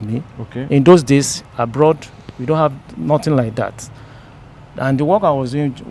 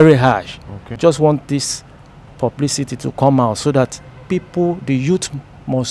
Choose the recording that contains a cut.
second; 1 cut; at 1.0 s

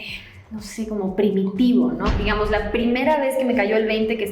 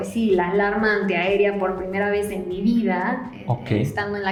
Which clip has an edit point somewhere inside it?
first; 1 cut; at 2.1 s

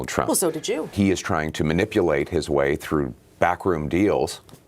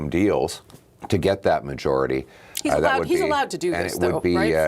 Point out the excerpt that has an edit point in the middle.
first; 1 cut; at 0.9 s

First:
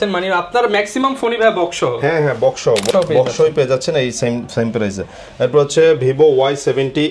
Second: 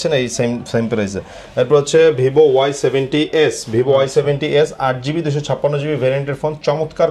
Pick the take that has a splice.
first; 1 cut; at 2.9 s

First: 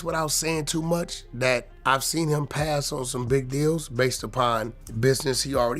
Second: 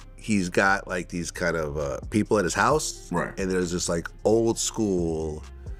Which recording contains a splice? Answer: first; 2 cuts; at 1.7 s, 4.8 s

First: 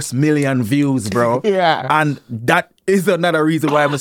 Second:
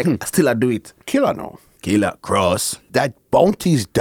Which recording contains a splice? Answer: second; 2 cuts; at 1.1 s, 2.7 s

